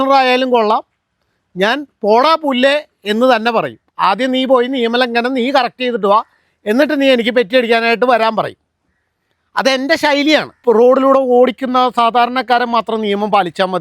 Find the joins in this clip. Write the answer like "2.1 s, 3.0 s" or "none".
10.5 s